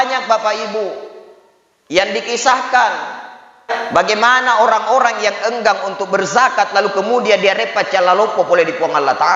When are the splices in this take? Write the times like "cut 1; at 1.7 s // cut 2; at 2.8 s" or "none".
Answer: cut 1; at 3.7 s